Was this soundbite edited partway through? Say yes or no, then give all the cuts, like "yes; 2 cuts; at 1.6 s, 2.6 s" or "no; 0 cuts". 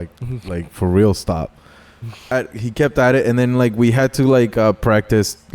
yes; 1 cut; at 2.3 s